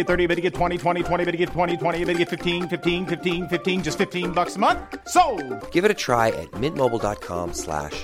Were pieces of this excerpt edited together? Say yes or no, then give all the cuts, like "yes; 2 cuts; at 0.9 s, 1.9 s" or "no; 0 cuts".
no; 0 cuts